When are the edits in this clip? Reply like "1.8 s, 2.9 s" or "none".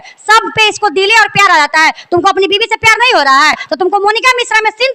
3.6 s